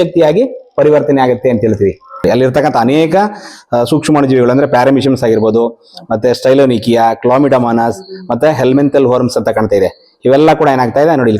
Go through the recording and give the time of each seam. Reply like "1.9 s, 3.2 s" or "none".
2.0 s